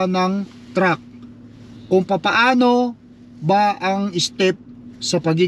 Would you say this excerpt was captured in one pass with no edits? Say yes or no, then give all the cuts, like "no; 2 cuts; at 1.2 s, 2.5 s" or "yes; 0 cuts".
yes; 0 cuts